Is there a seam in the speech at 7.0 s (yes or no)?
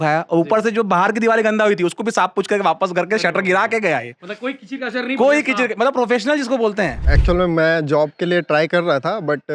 yes